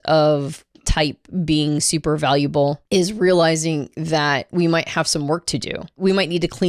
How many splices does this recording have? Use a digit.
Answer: 2